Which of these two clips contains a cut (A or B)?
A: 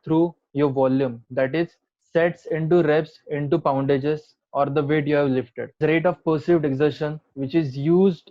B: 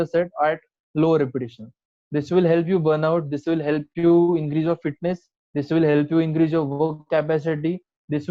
A